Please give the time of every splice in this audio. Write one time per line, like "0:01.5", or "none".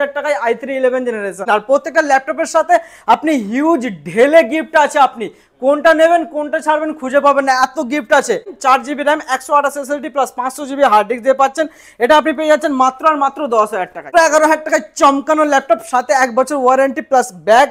0:01.5
0:08.5
0:14.1